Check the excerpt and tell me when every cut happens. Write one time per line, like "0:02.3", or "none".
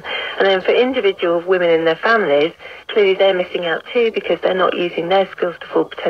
none